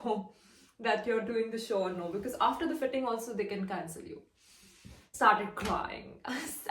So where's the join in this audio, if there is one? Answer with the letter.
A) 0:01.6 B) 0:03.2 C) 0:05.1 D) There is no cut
C